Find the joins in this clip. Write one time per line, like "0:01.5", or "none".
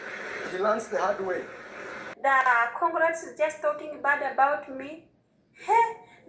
0:02.2